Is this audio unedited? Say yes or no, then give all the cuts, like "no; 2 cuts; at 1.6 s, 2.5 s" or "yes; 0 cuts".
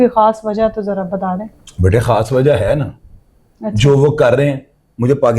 yes; 0 cuts